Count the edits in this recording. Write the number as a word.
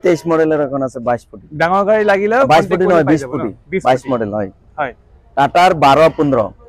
zero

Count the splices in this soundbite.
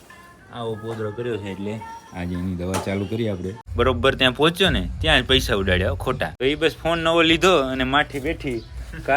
two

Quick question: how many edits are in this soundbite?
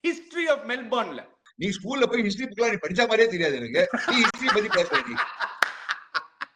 one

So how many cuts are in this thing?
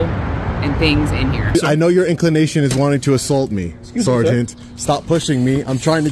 one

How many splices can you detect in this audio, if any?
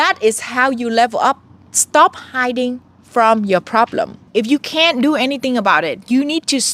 one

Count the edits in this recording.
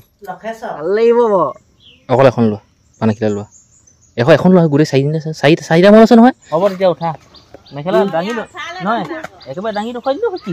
two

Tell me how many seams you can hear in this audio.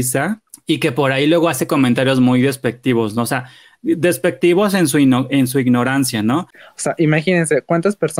one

